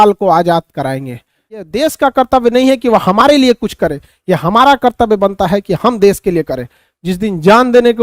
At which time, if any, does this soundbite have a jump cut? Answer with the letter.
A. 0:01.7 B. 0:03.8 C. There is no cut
A